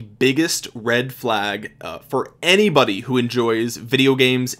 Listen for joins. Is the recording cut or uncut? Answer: uncut